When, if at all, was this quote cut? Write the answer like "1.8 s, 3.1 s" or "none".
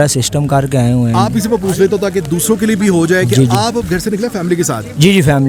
none